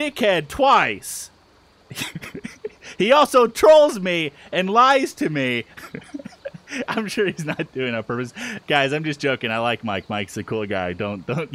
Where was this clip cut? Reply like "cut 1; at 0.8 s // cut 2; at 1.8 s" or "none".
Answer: none